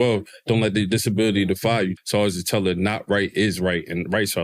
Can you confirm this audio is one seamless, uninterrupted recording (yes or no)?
no